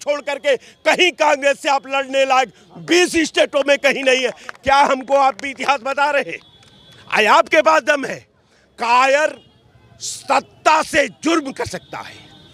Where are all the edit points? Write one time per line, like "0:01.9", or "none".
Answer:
none